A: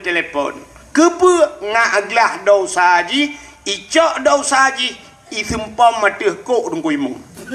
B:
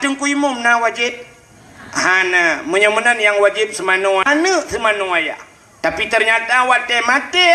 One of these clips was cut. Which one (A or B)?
B